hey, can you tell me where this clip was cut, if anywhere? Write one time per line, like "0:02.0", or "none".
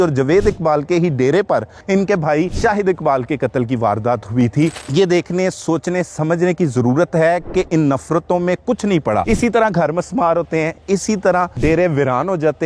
0:01.7
0:02.5
0:04.8
0:09.2
0:11.6